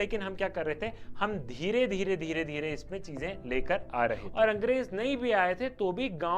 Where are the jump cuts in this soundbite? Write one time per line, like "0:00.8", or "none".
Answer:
0:04.3